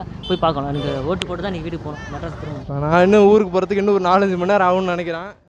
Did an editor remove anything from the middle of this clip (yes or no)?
no